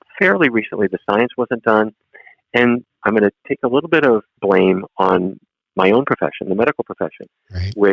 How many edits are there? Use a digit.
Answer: 2